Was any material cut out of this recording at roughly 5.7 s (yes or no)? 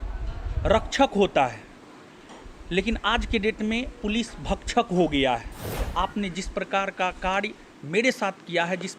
yes